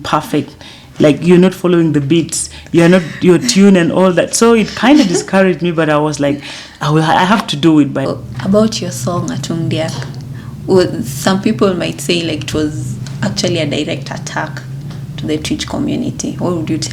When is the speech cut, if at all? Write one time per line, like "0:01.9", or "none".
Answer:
0:08.1